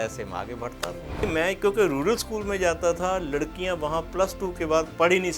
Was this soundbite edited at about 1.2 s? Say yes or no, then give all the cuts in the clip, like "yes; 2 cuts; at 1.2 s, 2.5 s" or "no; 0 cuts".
yes; 1 cut; at 1.2 s